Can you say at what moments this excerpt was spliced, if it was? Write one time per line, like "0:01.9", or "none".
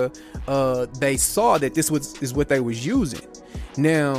none